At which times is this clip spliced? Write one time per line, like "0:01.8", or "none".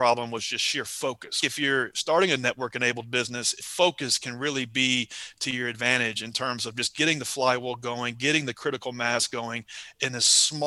0:01.4
0:03.6